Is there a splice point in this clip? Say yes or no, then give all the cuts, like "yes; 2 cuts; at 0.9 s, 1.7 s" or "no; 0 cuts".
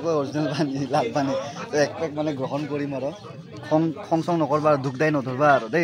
no; 0 cuts